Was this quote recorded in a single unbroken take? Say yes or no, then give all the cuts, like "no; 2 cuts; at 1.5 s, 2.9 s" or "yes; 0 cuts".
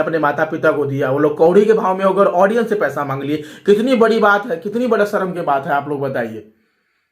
yes; 0 cuts